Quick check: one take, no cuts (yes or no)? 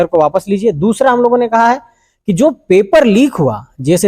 yes